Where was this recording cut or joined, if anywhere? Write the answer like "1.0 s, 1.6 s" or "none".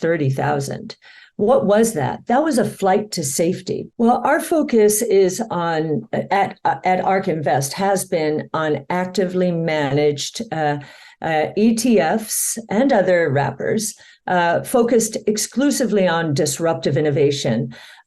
3.8 s